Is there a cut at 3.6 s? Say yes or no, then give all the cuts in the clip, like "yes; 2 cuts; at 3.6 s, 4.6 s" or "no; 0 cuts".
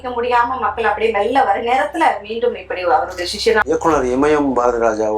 yes; 1 cut; at 3.6 s